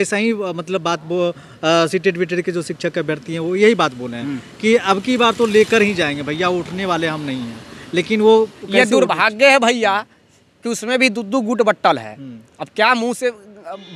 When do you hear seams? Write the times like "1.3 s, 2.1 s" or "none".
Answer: none